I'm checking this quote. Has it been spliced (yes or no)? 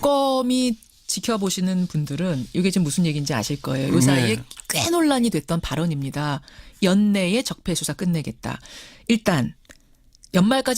yes